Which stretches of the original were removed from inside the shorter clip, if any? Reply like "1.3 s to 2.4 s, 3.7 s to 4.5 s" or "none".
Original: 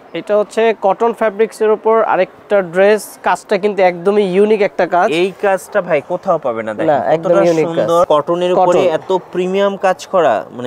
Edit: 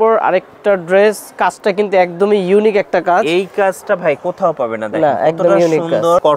none